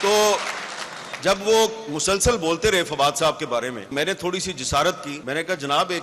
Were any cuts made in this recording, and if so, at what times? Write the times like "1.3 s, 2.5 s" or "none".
3.9 s, 5.1 s